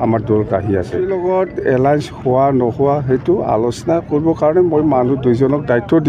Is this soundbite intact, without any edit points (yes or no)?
no